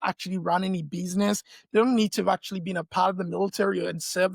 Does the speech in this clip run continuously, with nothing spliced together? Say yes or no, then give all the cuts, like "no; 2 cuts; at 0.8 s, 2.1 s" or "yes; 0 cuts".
yes; 0 cuts